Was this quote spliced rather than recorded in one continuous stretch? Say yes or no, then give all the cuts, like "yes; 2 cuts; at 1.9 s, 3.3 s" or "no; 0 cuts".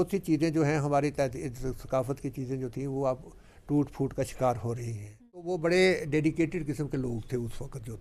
yes; 1 cut; at 5.5 s